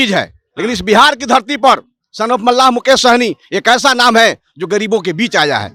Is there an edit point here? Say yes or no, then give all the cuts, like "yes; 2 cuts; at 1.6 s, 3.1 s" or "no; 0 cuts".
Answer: no; 0 cuts